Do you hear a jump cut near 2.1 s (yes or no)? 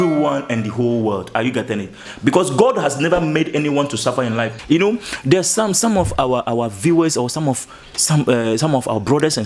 yes